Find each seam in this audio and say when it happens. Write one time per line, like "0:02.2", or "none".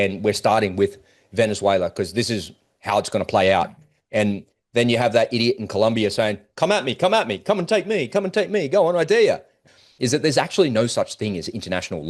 0:09.6